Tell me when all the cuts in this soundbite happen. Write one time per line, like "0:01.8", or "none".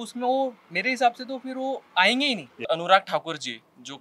0:02.6